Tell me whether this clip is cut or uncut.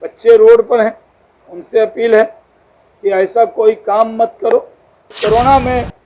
cut